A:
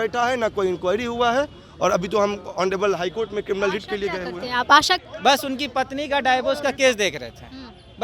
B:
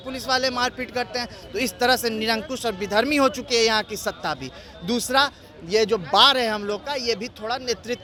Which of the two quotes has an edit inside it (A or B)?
A